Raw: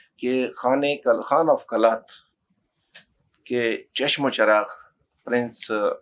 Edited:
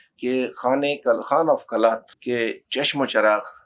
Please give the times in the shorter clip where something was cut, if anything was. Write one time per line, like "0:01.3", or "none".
0:02.1